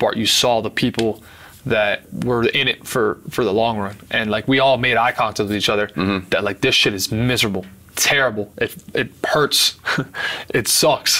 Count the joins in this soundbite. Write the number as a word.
one